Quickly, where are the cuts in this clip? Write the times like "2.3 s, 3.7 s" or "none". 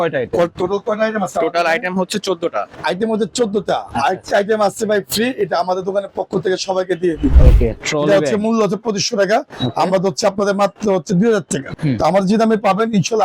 2.8 s, 7.3 s, 11.7 s